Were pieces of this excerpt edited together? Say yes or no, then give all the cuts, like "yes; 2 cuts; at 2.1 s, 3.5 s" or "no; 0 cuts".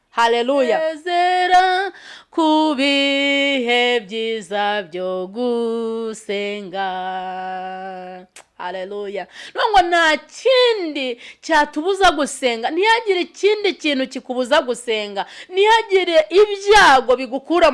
yes; 1 cut; at 0.9 s